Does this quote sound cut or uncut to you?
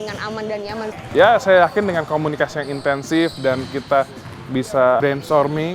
cut